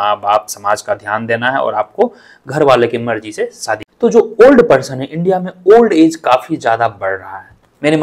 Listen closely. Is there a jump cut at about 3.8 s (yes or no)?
yes